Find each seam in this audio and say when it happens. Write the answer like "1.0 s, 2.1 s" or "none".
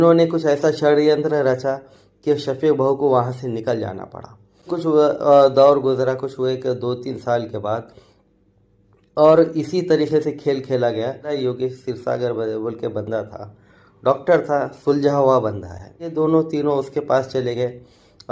4.7 s, 11.3 s, 16.1 s